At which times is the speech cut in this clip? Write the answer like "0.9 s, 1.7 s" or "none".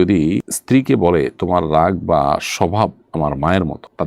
none